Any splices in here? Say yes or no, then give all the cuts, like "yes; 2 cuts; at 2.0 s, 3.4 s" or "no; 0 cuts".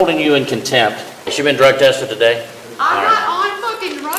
yes; 2 cuts; at 1.2 s, 2.6 s